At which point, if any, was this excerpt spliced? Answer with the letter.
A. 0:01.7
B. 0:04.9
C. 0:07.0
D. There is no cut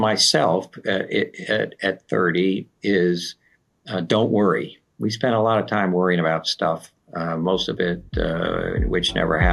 B